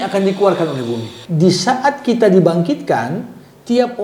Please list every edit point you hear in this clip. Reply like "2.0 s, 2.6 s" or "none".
1.1 s